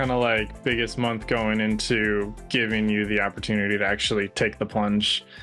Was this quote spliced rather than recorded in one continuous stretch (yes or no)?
no